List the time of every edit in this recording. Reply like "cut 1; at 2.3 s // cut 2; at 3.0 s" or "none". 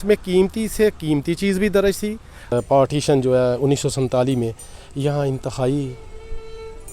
cut 1; at 2.5 s